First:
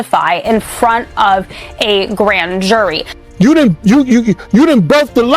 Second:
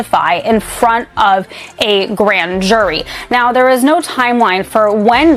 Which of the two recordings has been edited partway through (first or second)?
first